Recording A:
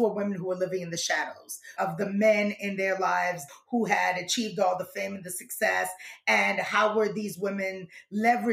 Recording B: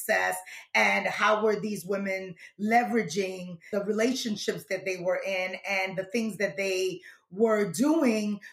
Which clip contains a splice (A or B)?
A